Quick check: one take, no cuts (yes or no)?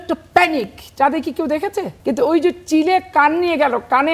no